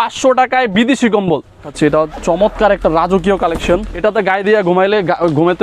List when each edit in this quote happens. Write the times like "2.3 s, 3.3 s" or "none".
1.7 s, 3.9 s